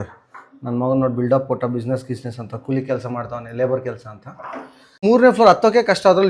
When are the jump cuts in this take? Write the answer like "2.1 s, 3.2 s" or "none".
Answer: 5.0 s